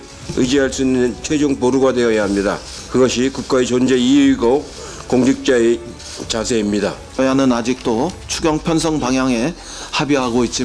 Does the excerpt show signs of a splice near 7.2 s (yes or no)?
yes